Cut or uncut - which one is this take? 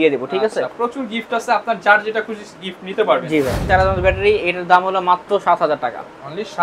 cut